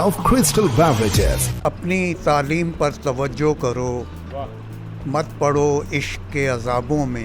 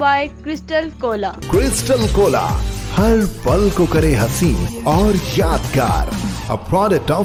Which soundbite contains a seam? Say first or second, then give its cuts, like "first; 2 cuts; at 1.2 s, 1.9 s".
first; 1 cut; at 1.6 s